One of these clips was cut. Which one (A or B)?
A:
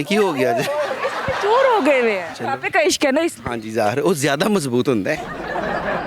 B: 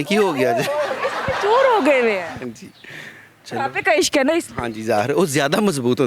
A